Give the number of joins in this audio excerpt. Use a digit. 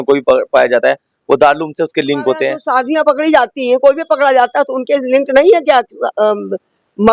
1